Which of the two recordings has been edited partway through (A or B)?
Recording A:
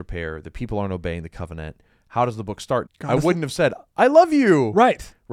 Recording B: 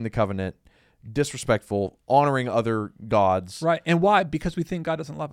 A